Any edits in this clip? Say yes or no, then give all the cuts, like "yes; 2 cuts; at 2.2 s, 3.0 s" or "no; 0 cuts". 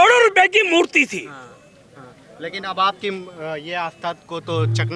no; 0 cuts